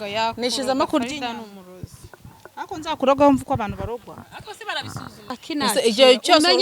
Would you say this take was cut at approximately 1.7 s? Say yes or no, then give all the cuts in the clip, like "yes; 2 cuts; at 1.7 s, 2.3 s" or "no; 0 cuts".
no; 1 cut; at 5.3 s